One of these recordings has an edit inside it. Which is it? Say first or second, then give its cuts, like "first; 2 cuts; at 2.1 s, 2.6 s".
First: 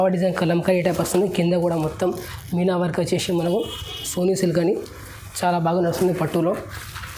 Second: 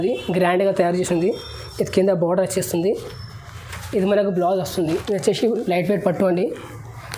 second; 1 cut; at 4.9 s